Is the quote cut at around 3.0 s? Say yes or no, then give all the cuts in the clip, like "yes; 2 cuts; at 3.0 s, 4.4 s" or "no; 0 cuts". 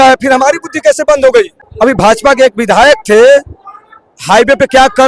no; 1 cut; at 1.6 s